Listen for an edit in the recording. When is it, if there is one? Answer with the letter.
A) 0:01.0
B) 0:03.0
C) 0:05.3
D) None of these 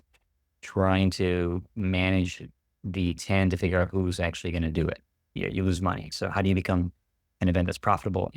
C